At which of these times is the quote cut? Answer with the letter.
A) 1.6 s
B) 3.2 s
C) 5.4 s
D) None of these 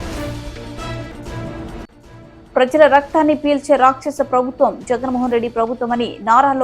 A